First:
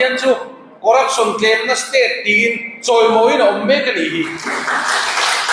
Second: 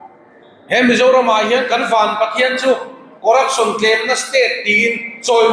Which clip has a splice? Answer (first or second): first